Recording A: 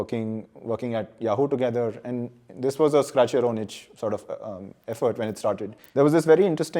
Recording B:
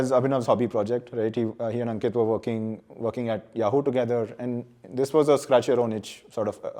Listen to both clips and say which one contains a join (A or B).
A